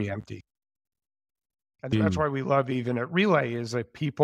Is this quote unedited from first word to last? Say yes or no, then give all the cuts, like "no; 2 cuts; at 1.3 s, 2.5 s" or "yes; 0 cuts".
no; 1 cut; at 2.7 s